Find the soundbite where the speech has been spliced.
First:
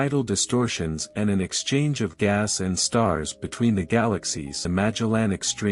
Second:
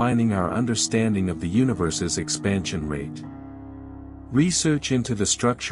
first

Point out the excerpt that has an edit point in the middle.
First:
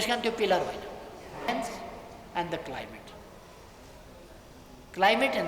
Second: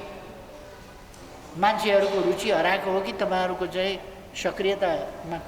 first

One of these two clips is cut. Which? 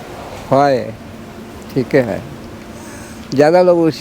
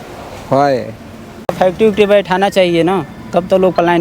second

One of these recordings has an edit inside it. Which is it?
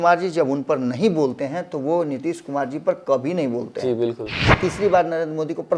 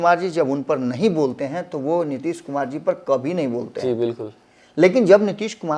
first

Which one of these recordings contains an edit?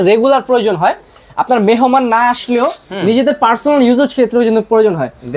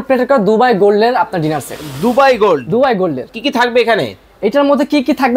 second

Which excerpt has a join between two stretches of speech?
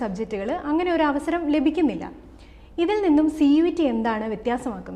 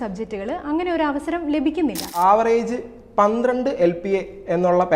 second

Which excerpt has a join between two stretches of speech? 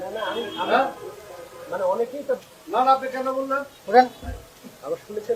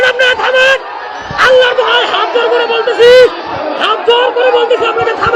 first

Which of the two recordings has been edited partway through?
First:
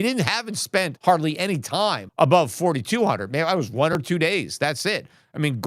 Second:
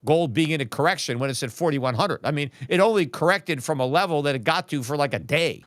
first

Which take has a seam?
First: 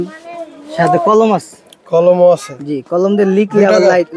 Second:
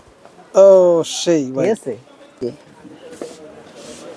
second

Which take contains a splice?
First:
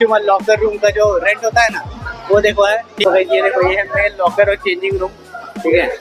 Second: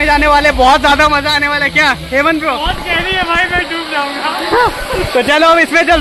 first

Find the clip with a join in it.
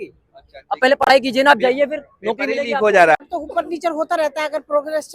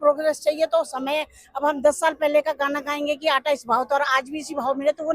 first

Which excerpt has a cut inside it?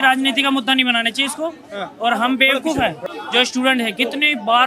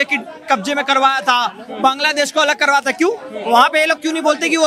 first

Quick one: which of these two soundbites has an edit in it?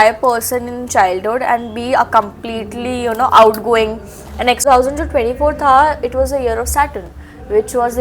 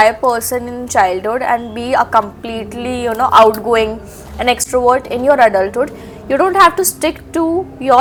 first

